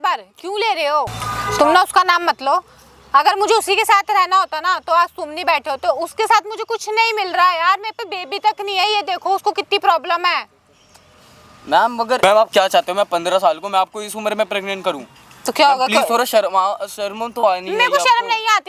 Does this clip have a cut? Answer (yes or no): no